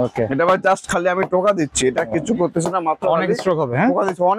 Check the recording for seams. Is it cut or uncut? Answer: uncut